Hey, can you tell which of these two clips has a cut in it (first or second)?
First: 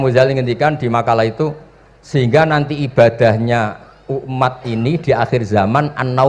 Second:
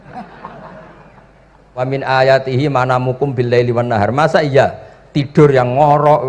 second